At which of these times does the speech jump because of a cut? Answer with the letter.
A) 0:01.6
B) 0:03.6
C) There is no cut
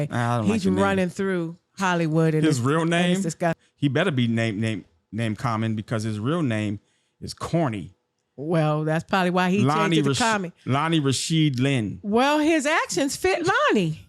B